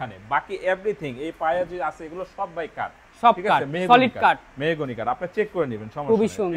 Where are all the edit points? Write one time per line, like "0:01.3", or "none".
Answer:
none